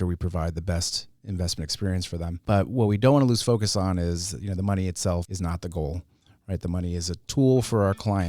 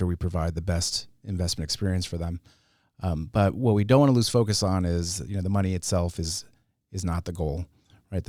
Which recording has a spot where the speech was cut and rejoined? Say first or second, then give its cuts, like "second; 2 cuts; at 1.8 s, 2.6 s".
first; 2 cuts; at 2.4 s, 5.3 s